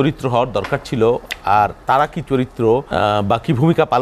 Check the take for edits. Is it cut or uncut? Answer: cut